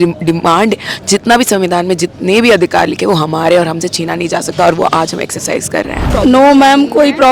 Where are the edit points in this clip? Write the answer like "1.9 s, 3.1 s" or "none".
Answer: 6.1 s